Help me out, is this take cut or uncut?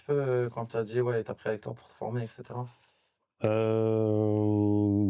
uncut